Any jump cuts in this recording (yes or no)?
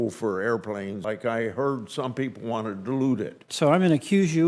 yes